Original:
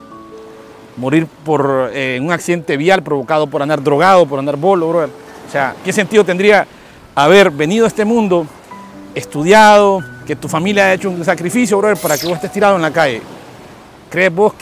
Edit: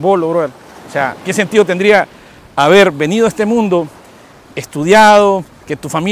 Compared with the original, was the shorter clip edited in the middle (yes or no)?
no